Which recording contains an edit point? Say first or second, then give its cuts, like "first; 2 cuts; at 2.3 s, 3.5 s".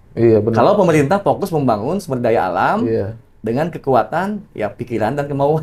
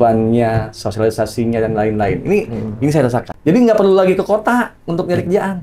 second; 1 cut; at 3.3 s